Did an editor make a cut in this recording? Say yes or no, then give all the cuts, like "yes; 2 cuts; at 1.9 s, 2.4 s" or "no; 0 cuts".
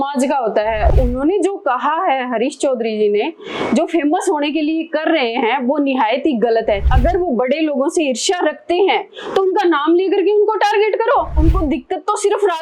yes; 3 cuts; at 0.9 s, 6.9 s, 11.4 s